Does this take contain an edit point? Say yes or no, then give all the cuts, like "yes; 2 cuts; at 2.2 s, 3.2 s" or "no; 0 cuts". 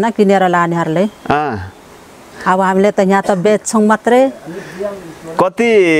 no; 0 cuts